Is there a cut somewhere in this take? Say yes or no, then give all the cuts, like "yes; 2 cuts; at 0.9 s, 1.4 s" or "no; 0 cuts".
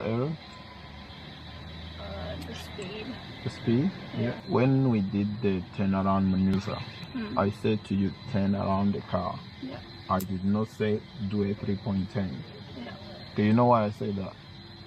yes; 1 cut; at 4.4 s